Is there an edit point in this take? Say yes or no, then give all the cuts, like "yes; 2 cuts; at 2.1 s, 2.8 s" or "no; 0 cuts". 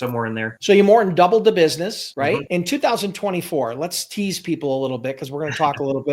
yes; 1 cut; at 2.4 s